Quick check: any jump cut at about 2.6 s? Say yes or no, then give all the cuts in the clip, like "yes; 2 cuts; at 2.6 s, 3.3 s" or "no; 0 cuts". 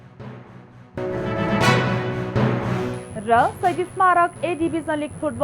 yes; 2 cuts; at 0.9 s, 2.6 s